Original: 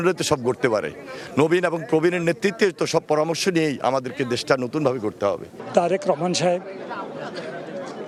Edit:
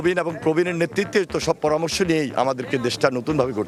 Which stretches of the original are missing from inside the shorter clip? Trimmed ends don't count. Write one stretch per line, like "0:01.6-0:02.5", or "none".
none